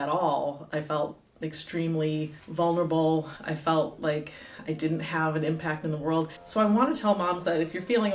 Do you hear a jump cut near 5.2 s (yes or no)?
no